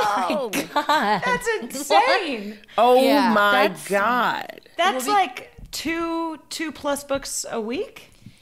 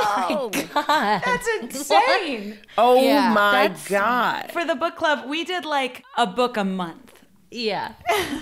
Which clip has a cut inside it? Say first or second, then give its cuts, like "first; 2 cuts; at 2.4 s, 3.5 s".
second; 2 cuts; at 4.5 s, 6.0 s